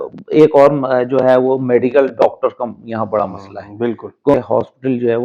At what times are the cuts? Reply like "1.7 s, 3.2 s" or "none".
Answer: 4.3 s